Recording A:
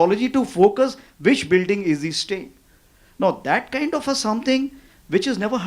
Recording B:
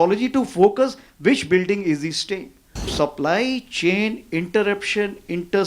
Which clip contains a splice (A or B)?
B